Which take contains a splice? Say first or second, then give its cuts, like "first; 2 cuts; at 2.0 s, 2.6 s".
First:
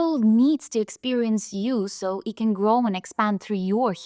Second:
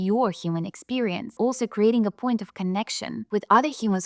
second; 2 cuts; at 1.3 s, 3.1 s